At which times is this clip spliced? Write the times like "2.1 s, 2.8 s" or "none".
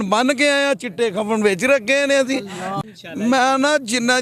2.7 s